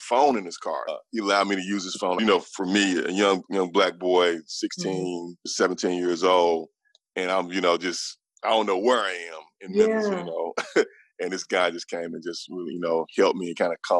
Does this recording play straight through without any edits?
no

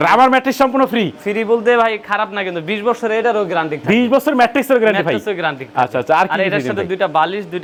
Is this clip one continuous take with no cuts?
yes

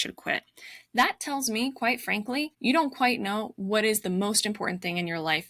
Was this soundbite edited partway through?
yes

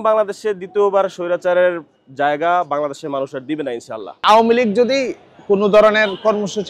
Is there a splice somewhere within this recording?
yes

